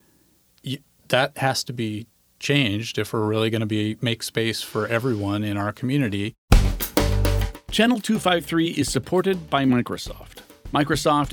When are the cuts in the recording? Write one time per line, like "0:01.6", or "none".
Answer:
0:06.4